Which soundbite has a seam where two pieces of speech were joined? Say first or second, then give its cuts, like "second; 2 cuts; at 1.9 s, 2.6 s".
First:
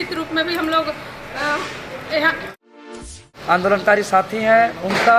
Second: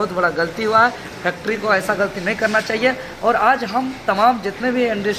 first; 1 cut; at 3.0 s